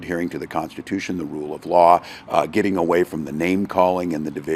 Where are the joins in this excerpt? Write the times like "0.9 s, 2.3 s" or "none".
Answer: none